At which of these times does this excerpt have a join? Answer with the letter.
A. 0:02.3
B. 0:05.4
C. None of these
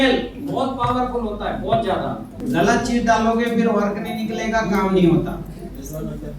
A